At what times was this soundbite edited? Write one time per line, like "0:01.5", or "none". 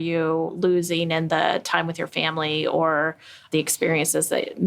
0:03.5